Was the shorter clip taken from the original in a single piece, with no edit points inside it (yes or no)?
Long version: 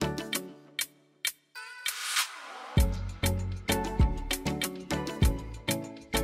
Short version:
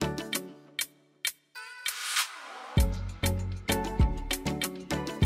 yes